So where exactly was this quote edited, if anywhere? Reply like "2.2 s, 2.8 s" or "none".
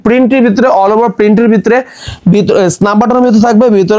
none